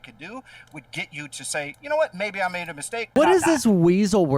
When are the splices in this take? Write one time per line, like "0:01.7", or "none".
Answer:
0:03.1